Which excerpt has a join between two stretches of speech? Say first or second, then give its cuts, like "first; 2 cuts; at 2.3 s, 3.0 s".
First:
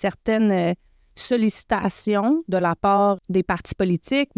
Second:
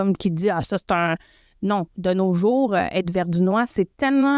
first; 1 cut; at 3.2 s